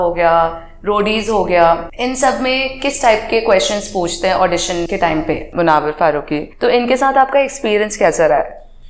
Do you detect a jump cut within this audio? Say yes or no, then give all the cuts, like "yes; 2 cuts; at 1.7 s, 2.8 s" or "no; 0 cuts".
yes; 3 cuts; at 1.9 s, 5.3 s, 6.5 s